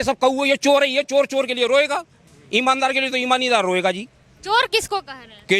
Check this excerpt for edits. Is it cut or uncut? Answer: uncut